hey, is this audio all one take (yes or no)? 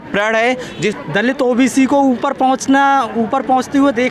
no